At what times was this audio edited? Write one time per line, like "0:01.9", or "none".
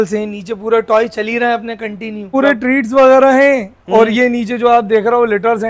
0:02.3